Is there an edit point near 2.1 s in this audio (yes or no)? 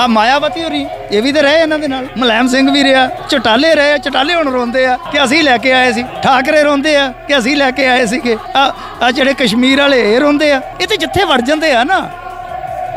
yes